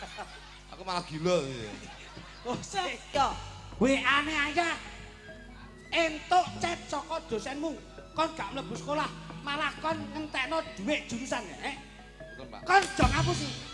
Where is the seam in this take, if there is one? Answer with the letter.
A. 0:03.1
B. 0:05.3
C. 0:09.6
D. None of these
A